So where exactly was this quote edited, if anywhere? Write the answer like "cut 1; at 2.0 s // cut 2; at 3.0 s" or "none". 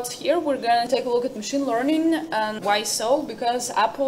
cut 1; at 0.9 s // cut 2; at 2.6 s